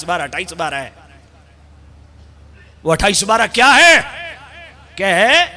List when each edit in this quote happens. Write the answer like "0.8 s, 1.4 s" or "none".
none